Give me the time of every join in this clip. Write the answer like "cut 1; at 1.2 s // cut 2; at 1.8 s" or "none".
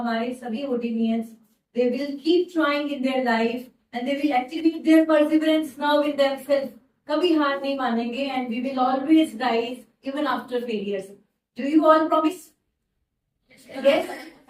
none

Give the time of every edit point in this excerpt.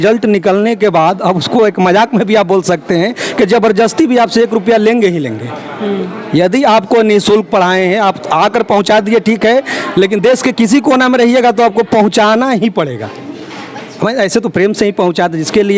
none

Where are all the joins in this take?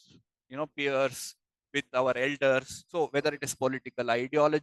cut 1; at 2.8 s

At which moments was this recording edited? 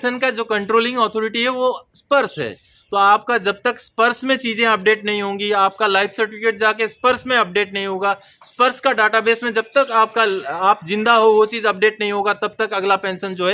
none

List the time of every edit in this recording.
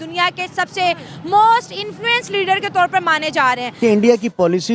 cut 1; at 3.7 s

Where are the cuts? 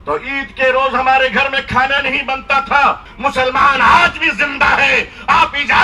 cut 1; at 3.1 s

